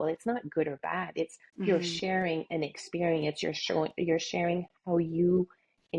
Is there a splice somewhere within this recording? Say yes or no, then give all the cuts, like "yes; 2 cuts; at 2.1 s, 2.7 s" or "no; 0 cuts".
no; 0 cuts